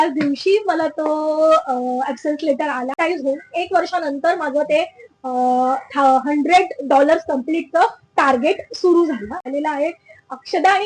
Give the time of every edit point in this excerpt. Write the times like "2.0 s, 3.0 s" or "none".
3.0 s, 9.5 s